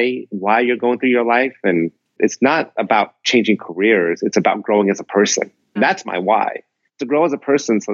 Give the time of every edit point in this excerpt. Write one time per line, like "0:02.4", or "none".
0:02.2
0:05.8